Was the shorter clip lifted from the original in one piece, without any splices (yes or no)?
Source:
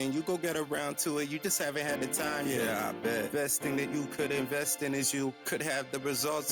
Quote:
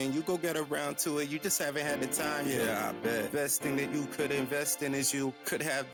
yes